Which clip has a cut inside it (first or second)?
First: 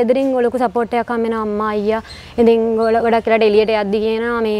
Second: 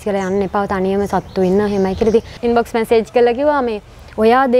second